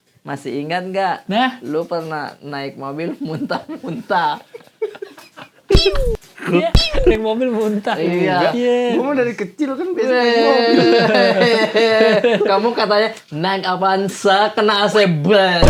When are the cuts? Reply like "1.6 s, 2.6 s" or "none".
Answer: none